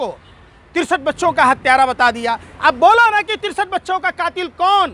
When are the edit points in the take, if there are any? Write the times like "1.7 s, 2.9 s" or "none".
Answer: none